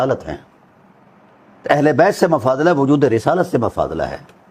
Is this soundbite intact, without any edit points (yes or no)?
yes